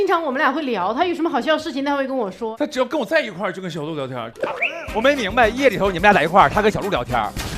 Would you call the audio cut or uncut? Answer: cut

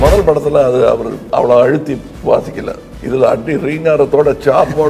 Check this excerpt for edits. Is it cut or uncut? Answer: cut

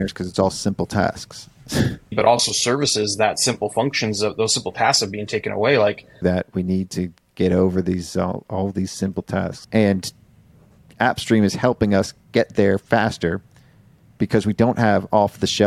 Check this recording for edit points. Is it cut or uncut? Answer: cut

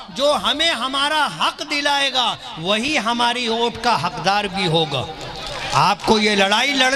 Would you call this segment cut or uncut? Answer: uncut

